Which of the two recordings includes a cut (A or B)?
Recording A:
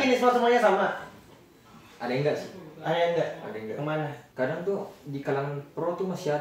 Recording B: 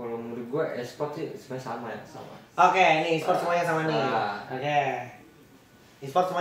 A